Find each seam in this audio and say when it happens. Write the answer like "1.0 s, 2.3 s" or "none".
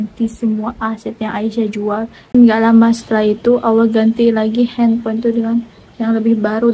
2.2 s